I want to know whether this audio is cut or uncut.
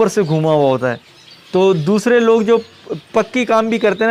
uncut